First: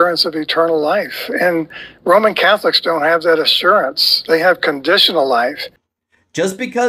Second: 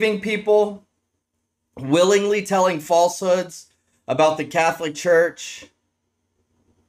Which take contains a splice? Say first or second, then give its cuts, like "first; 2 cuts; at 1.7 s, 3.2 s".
first; 1 cut; at 5.7 s